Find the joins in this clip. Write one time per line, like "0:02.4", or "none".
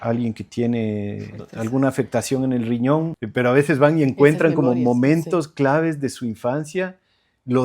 0:03.2